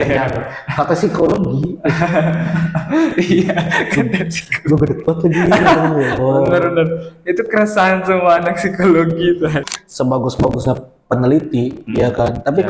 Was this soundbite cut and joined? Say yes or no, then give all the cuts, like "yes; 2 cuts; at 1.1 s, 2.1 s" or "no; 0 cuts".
yes; 1 cut; at 9.6 s